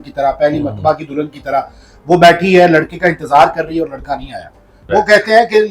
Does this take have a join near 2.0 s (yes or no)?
no